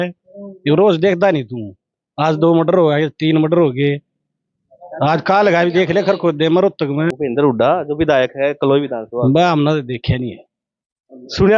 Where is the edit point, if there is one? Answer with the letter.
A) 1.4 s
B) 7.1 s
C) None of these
B